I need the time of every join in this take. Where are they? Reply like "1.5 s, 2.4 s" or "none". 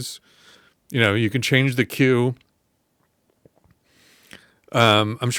none